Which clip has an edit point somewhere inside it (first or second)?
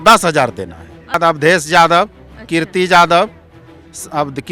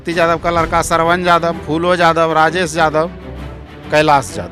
first